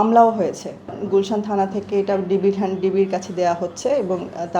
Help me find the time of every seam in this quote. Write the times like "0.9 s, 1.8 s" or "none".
1.0 s